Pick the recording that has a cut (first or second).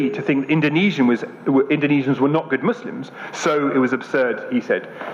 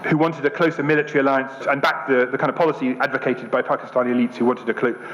second